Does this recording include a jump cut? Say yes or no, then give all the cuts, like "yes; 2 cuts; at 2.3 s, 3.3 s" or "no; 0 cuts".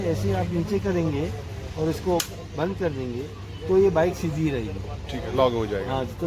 no; 0 cuts